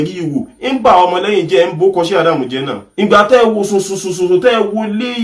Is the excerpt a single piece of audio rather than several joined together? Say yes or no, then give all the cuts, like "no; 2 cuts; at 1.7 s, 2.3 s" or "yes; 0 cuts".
no; 1 cut; at 2.8 s